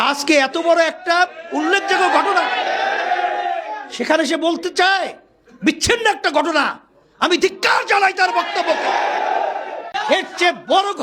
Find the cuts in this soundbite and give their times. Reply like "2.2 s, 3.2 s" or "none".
9.9 s